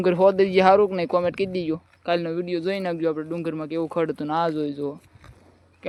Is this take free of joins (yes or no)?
yes